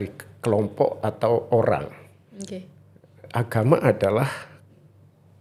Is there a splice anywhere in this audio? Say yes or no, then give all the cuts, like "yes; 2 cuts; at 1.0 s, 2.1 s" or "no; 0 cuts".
no; 0 cuts